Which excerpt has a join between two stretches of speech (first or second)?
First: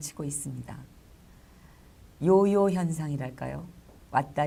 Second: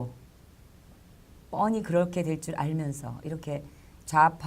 second